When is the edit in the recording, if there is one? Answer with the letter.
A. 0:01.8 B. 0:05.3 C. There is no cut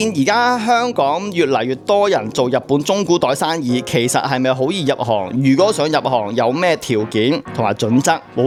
C